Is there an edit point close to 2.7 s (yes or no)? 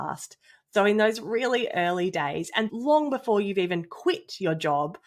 yes